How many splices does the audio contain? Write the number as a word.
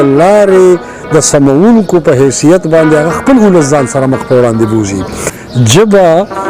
one